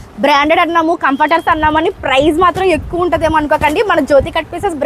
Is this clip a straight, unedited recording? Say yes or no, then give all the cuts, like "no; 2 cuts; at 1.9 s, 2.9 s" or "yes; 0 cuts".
yes; 0 cuts